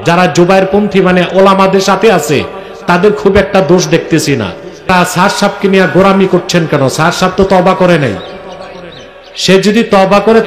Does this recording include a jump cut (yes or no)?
yes